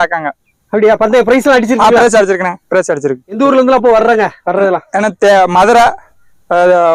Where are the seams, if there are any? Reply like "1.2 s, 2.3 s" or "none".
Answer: none